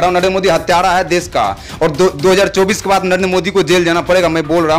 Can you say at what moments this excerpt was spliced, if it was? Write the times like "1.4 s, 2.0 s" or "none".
none